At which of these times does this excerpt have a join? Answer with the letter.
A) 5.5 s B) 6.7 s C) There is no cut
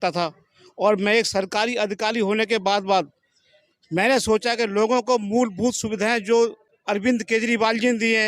B